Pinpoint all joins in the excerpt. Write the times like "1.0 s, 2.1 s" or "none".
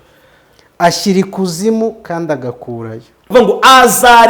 3.2 s